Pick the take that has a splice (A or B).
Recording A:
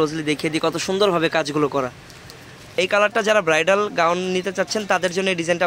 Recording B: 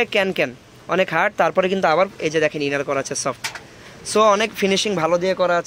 A